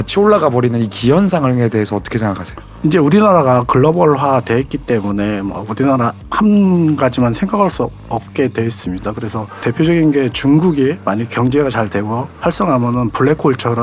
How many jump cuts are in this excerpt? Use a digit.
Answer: 0